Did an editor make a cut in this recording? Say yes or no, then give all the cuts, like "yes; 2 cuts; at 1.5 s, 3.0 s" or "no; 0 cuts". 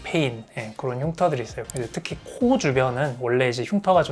yes; 1 cut; at 1.6 s